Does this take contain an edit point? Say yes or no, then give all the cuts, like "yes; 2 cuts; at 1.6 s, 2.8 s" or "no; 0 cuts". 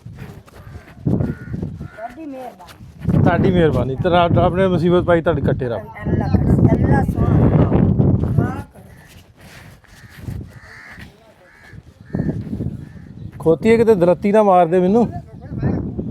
no; 0 cuts